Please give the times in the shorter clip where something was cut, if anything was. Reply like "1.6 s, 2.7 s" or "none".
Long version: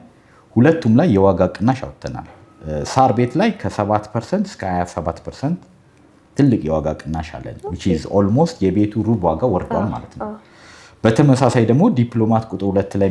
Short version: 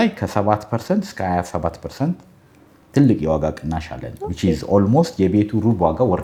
none

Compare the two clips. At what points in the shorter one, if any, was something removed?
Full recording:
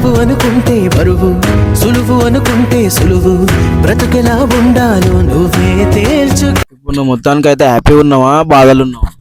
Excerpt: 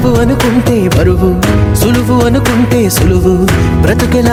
none

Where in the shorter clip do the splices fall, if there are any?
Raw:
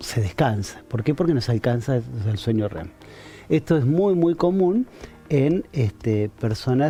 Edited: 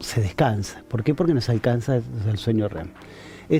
none

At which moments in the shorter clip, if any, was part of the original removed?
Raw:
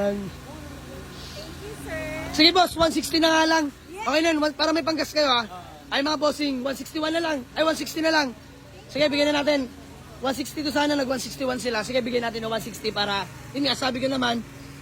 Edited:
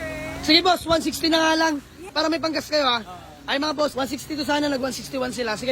2.1 s, 3.9 s

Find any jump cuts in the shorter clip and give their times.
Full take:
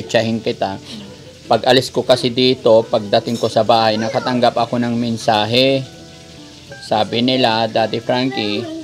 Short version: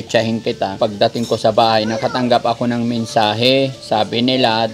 0.8 s, 3.8 s

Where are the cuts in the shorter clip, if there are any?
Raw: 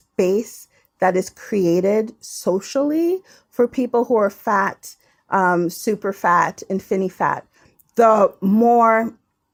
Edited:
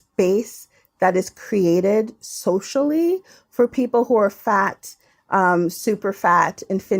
none

